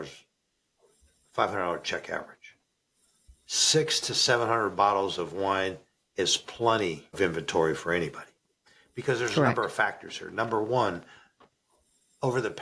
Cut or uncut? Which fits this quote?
uncut